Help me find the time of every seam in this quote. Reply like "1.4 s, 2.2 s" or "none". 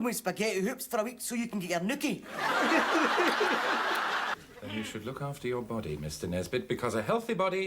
4.3 s